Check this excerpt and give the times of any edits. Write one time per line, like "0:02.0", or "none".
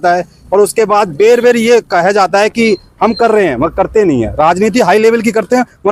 none